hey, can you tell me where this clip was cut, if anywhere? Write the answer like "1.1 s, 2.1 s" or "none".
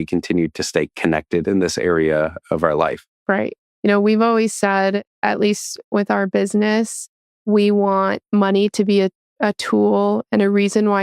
3.1 s